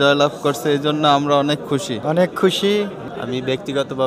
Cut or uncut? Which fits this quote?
cut